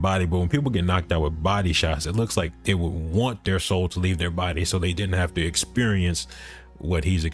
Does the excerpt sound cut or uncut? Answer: uncut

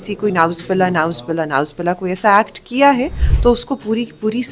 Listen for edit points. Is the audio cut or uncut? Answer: uncut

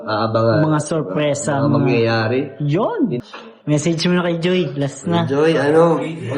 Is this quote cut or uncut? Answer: cut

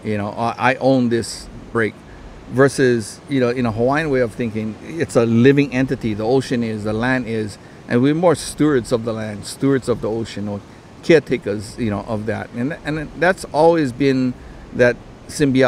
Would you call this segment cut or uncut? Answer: cut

